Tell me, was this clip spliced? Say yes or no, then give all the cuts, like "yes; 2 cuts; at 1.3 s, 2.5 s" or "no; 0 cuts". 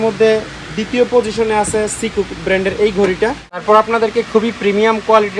yes; 1 cut; at 3.6 s